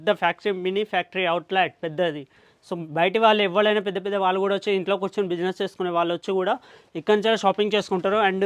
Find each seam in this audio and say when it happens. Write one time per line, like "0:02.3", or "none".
none